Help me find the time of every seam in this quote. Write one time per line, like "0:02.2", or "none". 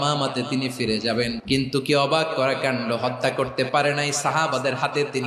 0:01.4